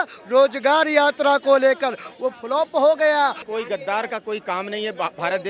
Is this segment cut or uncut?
cut